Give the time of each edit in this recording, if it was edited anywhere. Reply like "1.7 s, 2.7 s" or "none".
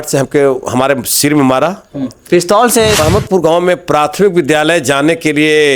3.0 s